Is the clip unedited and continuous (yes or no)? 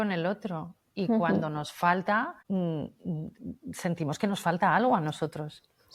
yes